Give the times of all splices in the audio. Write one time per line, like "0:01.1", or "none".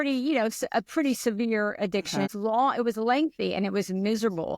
0:02.3